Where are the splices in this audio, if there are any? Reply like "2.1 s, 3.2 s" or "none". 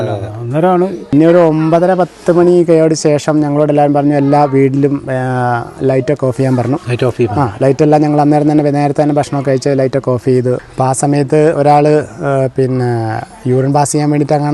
1.0 s, 10.6 s